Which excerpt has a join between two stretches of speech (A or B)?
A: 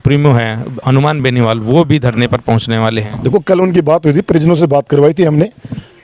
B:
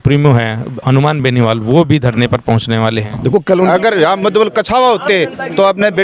B